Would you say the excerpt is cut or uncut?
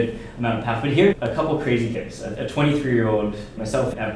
cut